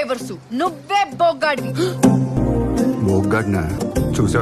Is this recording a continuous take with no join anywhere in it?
yes; 0 cuts

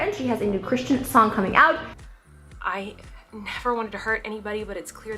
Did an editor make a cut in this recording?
yes; 1 cut; at 1.9 s

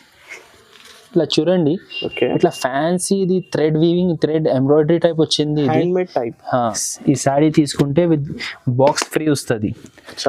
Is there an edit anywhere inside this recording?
yes; 1 cut; at 6.6 s

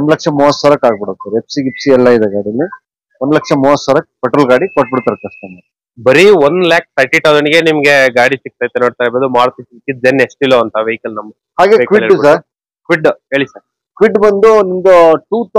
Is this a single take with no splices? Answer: yes; 0 cuts

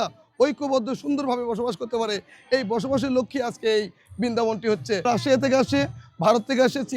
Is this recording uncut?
no; 1 cut; at 5.0 s

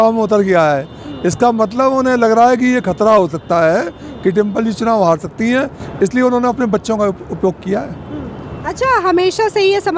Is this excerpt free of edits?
yes; 0 cuts

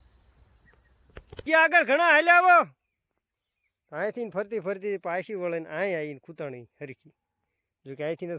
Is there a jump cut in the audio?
yes; 1 cut; at 1.4 s

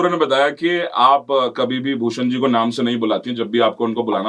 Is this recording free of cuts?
yes; 0 cuts

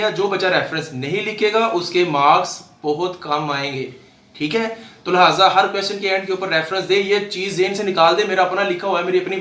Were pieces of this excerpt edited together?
no; 0 cuts

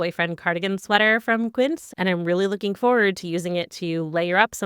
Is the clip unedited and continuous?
no; 1 cut; at 1.9 s

